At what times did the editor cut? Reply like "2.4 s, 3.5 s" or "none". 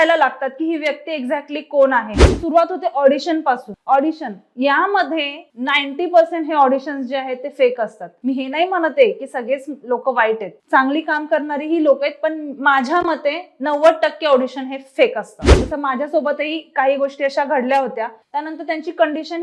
2.2 s, 18.2 s